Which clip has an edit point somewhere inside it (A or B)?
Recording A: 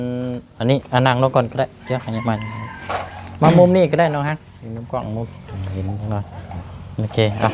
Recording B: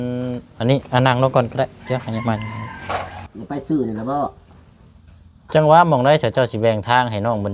B